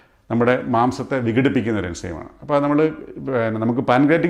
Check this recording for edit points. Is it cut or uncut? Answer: uncut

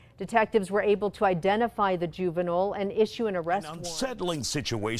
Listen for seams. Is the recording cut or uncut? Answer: cut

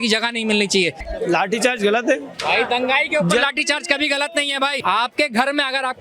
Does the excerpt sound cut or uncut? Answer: cut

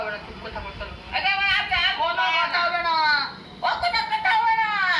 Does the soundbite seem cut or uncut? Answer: uncut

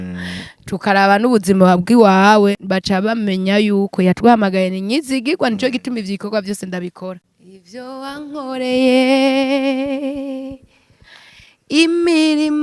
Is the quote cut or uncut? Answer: cut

